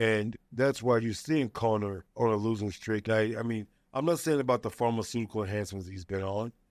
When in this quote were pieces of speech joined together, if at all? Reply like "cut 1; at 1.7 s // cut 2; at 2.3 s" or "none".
cut 1; at 2.0 s // cut 2; at 3.0 s

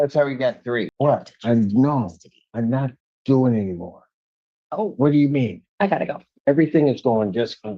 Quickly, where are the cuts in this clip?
cut 1; at 0.9 s // cut 2; at 5.6 s

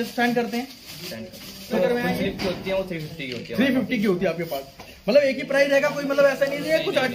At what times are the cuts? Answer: cut 1; at 1.7 s

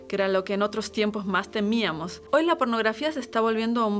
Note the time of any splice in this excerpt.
cut 1; at 2.2 s

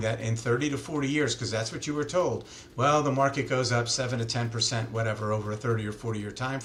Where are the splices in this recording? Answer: none

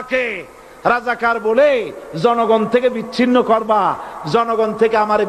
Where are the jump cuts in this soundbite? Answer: none

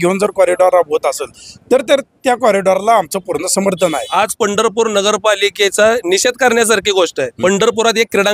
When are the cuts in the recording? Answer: cut 1; at 4.0 s // cut 2; at 7.3 s

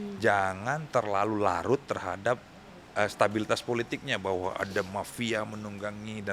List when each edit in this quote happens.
none

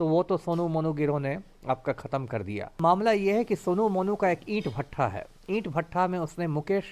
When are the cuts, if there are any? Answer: cut 1; at 2.8 s

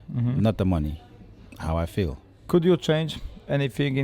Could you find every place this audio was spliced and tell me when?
cut 1; at 2.3 s

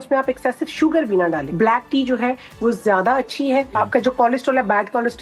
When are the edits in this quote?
cut 1; at 1.5 s // cut 2; at 3.7 s

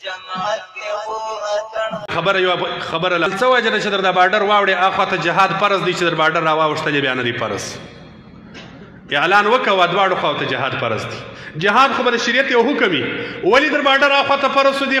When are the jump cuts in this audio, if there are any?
cut 1; at 2.0 s

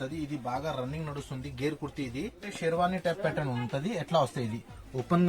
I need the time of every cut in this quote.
cut 1; at 2.5 s

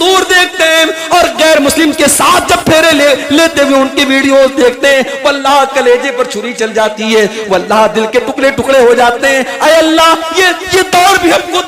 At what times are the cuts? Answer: none

